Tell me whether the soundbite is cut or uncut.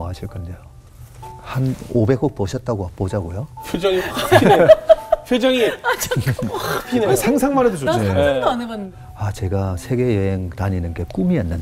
cut